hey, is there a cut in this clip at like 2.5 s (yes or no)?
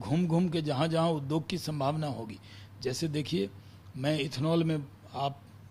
no